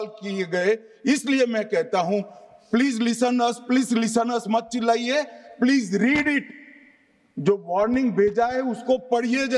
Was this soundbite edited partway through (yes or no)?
no